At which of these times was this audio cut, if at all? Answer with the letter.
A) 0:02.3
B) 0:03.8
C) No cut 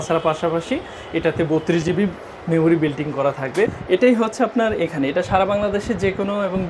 B